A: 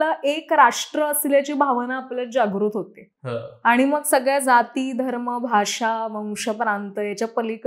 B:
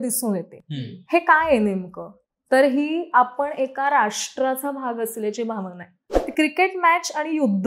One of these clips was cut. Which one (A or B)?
B